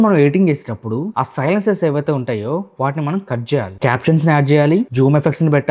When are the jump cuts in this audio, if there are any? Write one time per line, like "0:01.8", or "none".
0:01.1
0:03.7
0:04.9